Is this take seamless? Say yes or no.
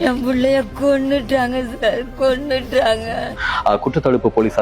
no